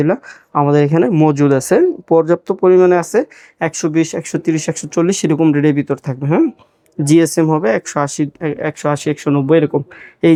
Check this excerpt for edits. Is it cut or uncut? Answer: uncut